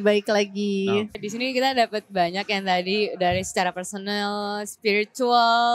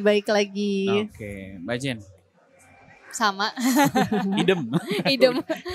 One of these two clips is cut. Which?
first; 1 cut; at 1.2 s

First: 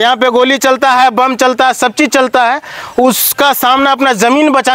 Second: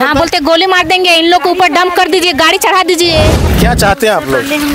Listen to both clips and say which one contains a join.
second; 1 cut; at 3.4 s

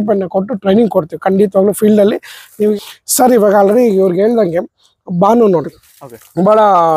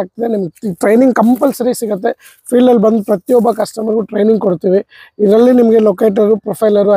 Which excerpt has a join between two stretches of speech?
first; 1 cut; at 2.7 s

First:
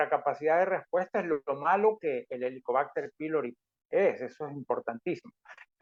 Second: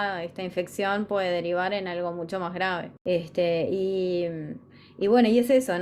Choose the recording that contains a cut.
second; 1 cut; at 2.9 s

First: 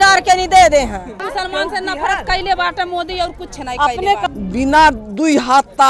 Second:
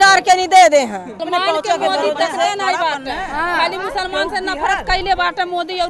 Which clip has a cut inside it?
first; 2 cuts; at 1.2 s, 4.3 s

